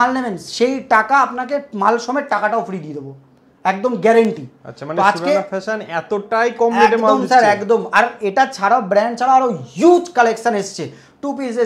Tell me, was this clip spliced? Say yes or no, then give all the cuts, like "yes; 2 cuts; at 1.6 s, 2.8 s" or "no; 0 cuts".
no; 0 cuts